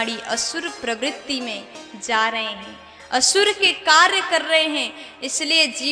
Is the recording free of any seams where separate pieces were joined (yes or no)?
yes